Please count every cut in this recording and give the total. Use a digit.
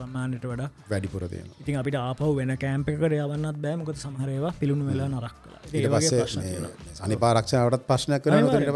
0